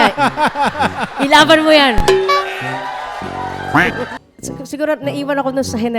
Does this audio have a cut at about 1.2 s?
no; 1 cut; at 4.2 s

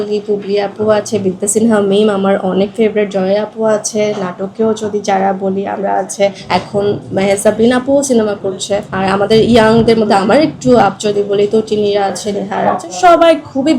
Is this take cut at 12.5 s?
no; 2 cuts; at 6.4 s, 8.9 s

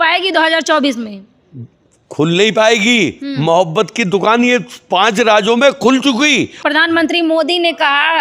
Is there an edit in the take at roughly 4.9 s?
no; 1 cut; at 6.6 s

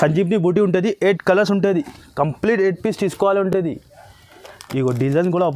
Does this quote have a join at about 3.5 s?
no; 0 cuts

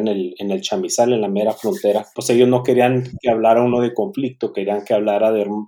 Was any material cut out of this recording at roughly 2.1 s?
yes; 1 cut; at 2.1 s

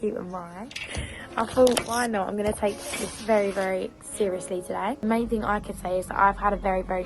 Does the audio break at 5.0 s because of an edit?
yes; 1 cut; at 5.0 s

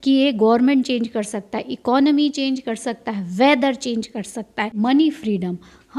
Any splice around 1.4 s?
no; 1 cut; at 4.7 s

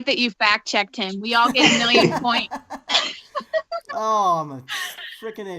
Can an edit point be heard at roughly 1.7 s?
no; 1 cut; at 3.8 s

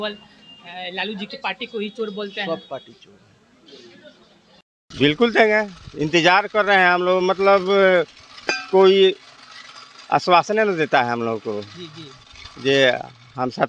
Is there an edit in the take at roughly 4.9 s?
yes; 1 cut; at 4.9 s

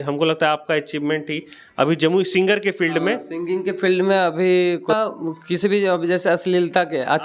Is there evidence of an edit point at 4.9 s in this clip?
yes; 1 cut; at 4.9 s

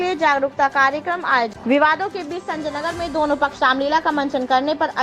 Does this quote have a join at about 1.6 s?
yes; 1 cut; at 1.6 s

